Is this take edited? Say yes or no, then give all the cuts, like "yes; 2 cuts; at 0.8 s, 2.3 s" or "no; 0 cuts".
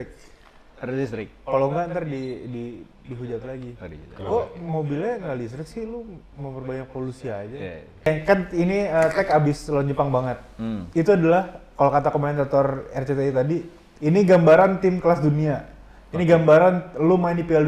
yes; 1 cut; at 8.1 s